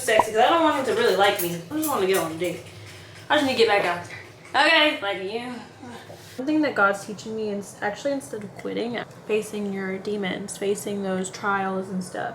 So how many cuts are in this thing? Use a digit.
3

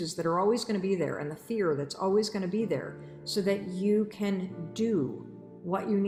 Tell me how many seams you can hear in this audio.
0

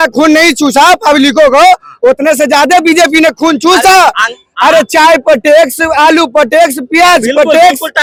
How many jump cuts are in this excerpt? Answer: 0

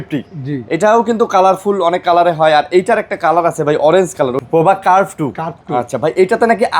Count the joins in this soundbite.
1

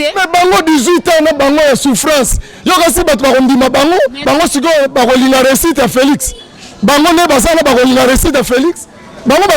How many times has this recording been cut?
1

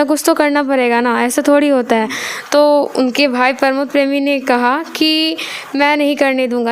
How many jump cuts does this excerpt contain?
0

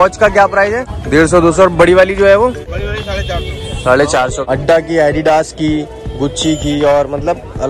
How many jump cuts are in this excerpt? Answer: 3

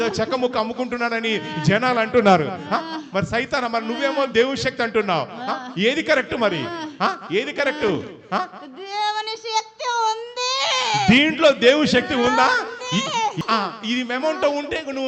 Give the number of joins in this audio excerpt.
1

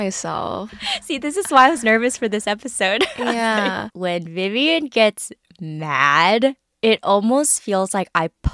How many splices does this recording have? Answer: 1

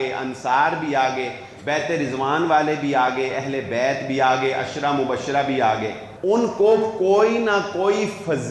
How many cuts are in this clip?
1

